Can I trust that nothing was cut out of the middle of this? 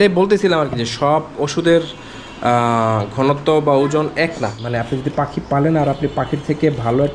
no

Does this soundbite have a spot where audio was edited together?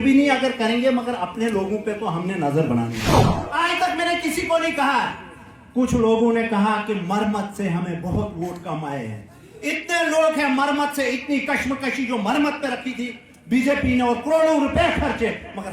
yes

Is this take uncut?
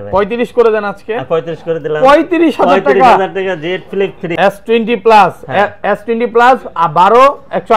no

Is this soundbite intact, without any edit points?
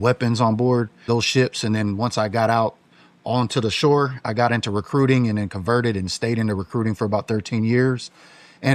no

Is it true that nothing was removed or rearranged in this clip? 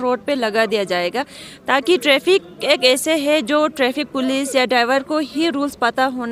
yes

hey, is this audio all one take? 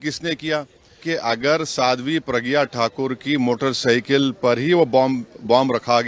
no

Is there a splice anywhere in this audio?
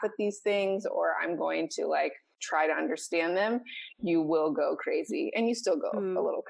no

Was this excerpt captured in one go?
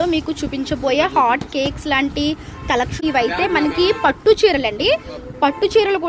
no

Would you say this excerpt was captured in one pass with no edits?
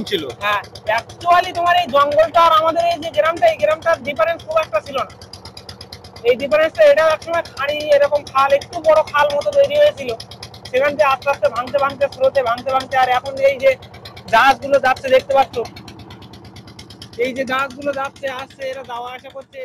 yes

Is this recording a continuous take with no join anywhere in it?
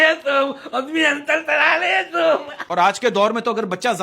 no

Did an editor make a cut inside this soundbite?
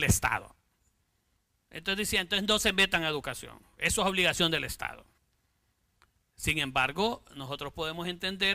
yes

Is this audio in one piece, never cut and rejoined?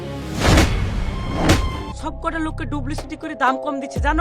no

